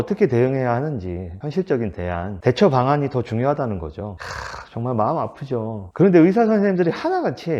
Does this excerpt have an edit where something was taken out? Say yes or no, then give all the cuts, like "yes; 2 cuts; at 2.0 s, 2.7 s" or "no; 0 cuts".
yes; 1 cut; at 4.1 s